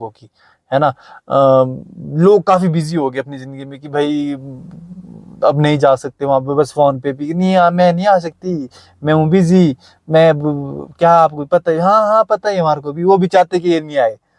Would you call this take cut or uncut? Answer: uncut